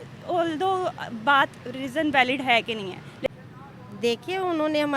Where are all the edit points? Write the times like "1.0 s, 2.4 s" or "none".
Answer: 3.3 s